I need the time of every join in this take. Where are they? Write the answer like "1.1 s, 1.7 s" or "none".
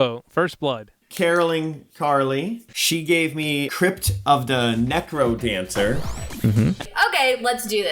1.0 s, 2.7 s, 6.9 s